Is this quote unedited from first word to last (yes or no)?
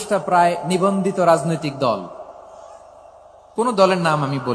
yes